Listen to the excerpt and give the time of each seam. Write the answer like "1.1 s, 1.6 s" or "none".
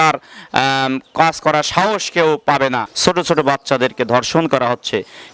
2.9 s